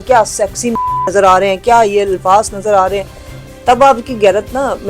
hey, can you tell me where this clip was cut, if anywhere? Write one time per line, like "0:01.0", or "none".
none